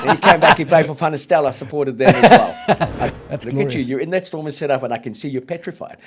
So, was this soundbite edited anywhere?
yes; 1 cut; at 3.2 s

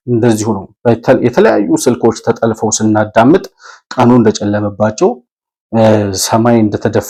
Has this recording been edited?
no; 0 cuts

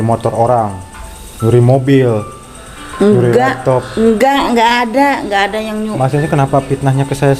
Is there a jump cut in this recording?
no; 0 cuts

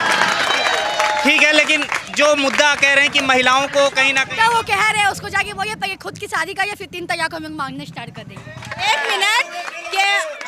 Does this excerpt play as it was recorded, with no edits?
no; 1 cut; at 8.8 s

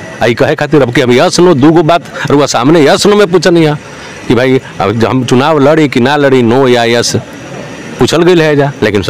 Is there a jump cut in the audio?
no; 0 cuts

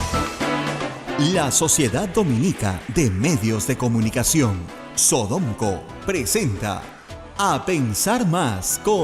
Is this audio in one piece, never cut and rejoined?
no; 1 cut; at 1.0 s

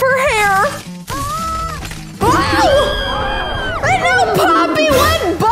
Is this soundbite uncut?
yes; 0 cuts

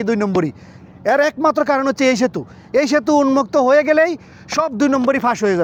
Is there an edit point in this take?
no; 0 cuts

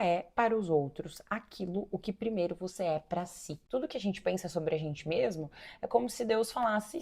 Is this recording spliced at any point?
yes; 1 cut; at 3.5 s

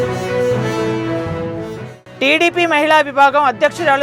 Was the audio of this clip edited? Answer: yes; 1 cut; at 1.6 s

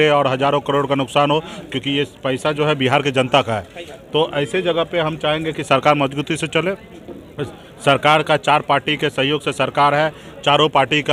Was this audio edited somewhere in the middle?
no; 0 cuts

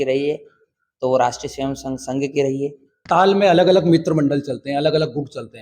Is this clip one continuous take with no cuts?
no; 1 cut; at 3.0 s

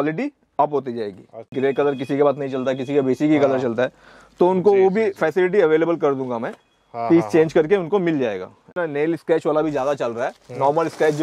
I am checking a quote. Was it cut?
yes; 2 cuts; at 1.5 s, 8.8 s

